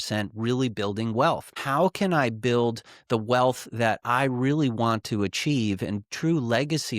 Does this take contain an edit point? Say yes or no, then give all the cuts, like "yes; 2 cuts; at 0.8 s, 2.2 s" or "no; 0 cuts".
yes; 1 cut; at 1.6 s